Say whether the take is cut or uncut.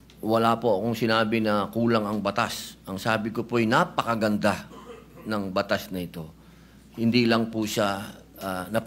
uncut